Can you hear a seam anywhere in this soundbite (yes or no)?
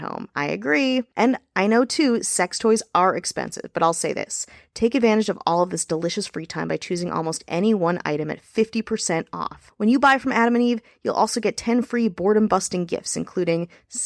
no